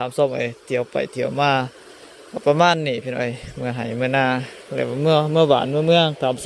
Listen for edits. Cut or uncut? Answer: uncut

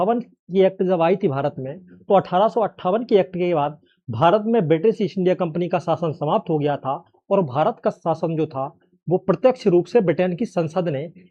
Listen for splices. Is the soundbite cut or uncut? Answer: uncut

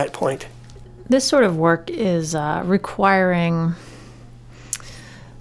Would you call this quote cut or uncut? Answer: uncut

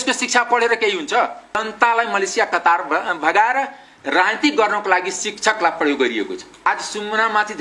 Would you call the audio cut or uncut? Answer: cut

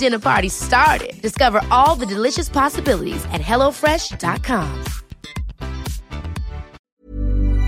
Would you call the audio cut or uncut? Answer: cut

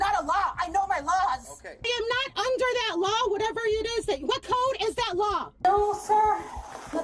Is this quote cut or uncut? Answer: cut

